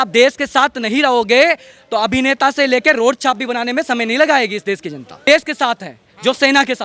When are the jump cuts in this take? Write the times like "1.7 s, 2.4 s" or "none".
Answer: 5.3 s